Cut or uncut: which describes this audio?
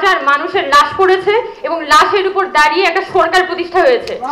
uncut